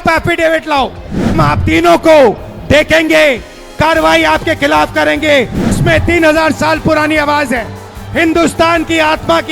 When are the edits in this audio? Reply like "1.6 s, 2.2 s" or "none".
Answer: 1.4 s, 5.8 s